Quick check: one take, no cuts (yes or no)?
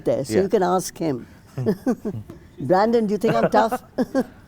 yes